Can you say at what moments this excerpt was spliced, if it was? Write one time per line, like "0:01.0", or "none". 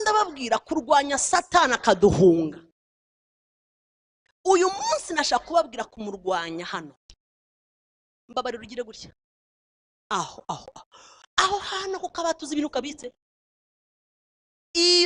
none